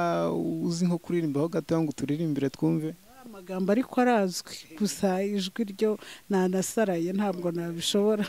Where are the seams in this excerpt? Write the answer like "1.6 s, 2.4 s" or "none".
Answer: none